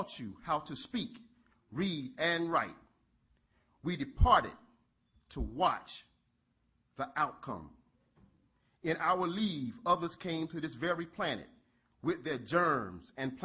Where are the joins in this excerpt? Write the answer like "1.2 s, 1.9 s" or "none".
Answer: none

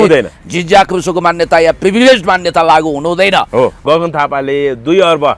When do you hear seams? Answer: 3.8 s

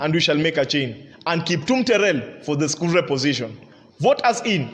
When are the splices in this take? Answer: none

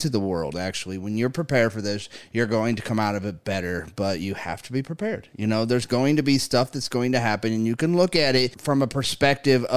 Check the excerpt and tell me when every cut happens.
8.6 s

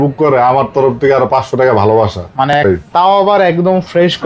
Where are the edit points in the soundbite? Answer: 2.6 s

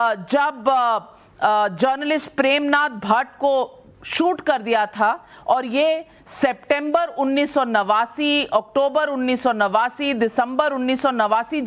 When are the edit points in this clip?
8.9 s

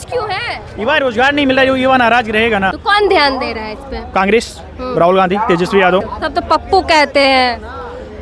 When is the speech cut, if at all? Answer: 2.8 s, 6.2 s

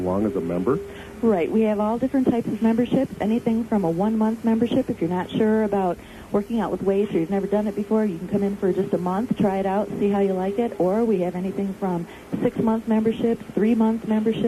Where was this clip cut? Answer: 3.3 s

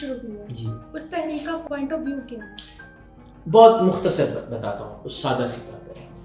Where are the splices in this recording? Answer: none

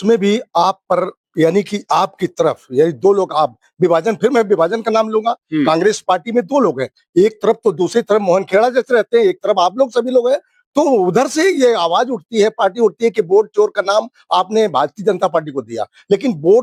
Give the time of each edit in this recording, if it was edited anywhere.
none

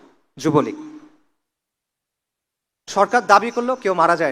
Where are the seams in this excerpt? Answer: none

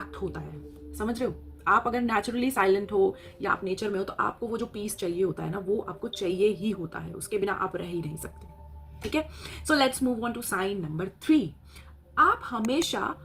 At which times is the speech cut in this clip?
11.1 s

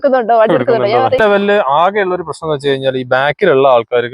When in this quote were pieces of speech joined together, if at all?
1.2 s

